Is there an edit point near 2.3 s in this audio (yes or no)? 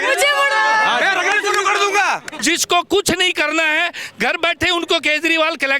yes